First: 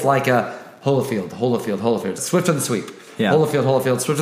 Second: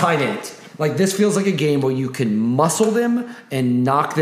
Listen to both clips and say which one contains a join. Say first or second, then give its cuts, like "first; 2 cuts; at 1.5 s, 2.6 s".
first; 1 cut; at 2.2 s